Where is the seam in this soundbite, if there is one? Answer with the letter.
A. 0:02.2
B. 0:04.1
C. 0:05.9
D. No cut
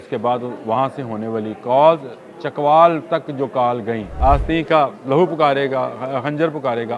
B